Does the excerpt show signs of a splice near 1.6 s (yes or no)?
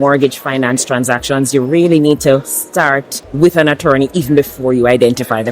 no